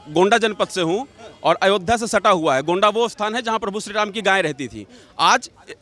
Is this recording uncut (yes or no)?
yes